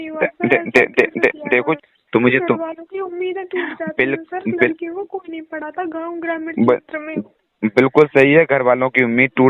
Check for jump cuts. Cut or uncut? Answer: cut